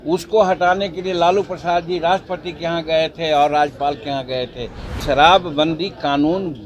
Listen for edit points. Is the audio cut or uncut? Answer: cut